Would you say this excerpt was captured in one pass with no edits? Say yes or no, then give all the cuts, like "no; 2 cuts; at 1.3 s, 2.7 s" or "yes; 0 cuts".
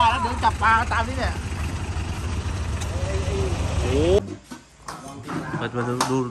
no; 1 cut; at 4.2 s